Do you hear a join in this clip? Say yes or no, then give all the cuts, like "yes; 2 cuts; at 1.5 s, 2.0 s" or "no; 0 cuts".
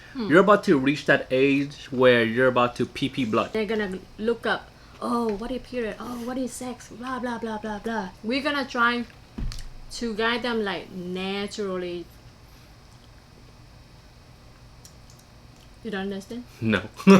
yes; 2 cuts; at 3.5 s, 8.1 s